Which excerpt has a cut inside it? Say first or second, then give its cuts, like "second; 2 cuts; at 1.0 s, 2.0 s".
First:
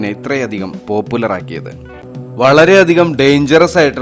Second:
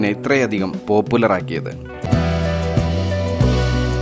first; 1 cut; at 1.9 s